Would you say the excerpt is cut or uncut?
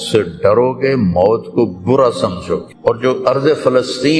cut